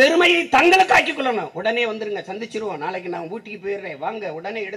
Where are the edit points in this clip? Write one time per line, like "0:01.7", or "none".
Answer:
none